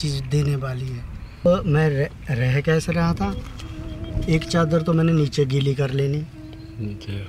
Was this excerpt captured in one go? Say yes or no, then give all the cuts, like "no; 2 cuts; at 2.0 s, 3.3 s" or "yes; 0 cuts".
no; 1 cut; at 1.5 s